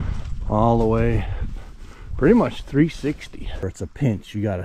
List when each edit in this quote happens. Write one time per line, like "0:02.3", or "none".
0:03.6

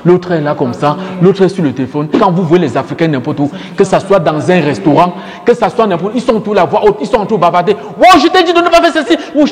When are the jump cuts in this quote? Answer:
0:02.2

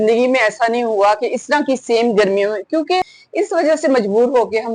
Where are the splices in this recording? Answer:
0:03.2

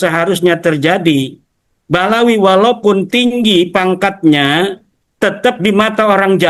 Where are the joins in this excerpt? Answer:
none

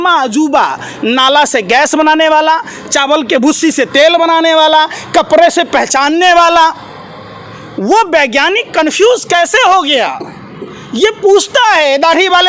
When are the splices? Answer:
none

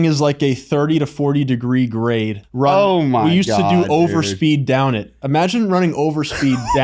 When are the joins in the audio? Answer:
0:02.4

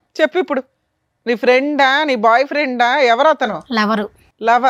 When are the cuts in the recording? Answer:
none

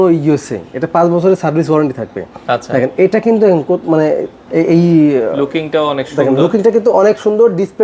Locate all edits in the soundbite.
none

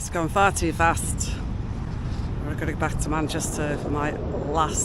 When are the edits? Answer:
none

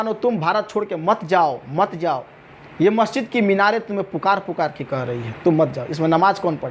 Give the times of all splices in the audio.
none

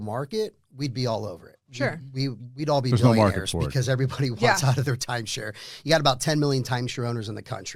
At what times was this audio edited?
none

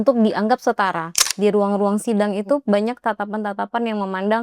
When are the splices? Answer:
0:01.2

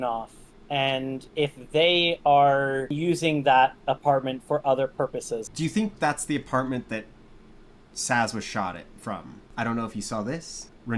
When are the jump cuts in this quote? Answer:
0:01.2
0:02.9
0:05.4
0:09.4

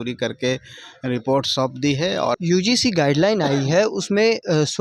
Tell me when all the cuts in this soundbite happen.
0:02.4

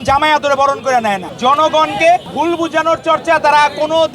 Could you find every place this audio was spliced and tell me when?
0:01.3
0:02.3

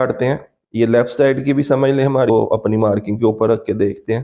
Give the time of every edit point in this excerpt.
0:02.3

